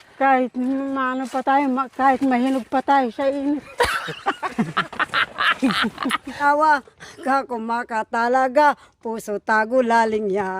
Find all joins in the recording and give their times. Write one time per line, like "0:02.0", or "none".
0:06.4